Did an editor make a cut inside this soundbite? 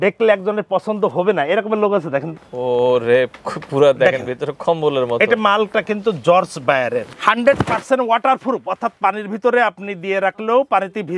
yes; 2 cuts; at 2.4 s, 7.1 s

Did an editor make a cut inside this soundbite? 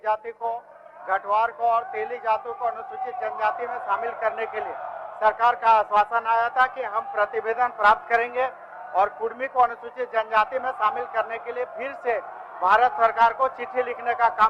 no; 0 cuts

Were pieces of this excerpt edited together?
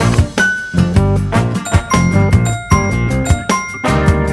no; 0 cuts

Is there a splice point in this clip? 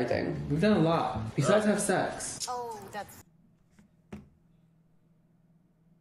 no; 0 cuts

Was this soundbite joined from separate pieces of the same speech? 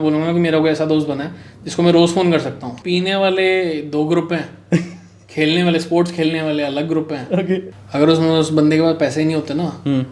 yes; 2 cuts; at 2.7 s, 7.7 s

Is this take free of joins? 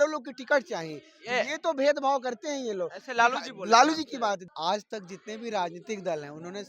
no; 1 cut; at 4.5 s

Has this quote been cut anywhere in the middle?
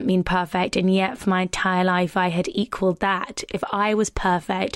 yes; 1 cut; at 3.5 s

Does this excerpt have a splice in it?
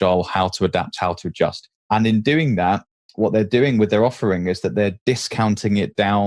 no; 0 cuts

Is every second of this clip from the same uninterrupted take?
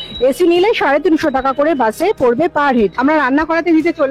no; 1 cut; at 3.0 s

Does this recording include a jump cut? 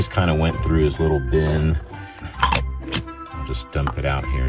yes; 1 cut; at 2.2 s

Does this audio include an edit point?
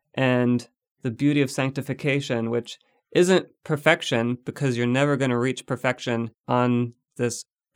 yes; 1 cut; at 6.4 s

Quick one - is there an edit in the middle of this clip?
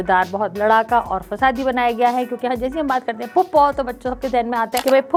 no; 0 cuts

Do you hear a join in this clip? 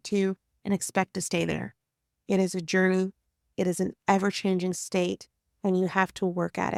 no; 0 cuts

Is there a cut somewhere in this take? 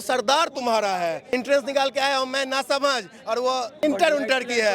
yes; 2 cuts; at 1.3 s, 3.8 s

